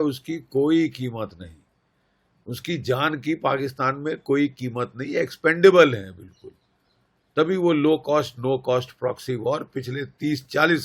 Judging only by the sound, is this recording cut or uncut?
uncut